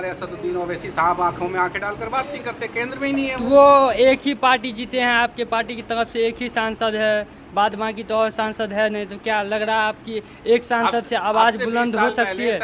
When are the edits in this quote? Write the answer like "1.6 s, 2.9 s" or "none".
none